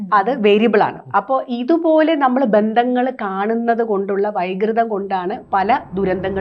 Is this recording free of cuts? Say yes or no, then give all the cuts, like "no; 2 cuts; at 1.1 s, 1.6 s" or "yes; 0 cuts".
yes; 0 cuts